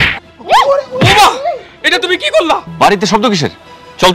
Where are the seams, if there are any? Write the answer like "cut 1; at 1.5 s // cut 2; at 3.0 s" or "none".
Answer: cut 1; at 2.7 s